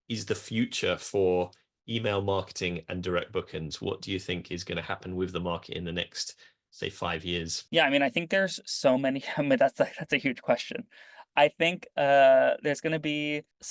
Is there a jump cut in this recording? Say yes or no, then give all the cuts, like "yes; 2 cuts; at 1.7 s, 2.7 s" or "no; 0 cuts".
no; 0 cuts